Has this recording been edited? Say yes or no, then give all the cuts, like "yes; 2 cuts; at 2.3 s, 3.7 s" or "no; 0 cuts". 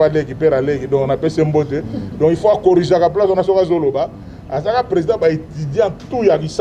no; 0 cuts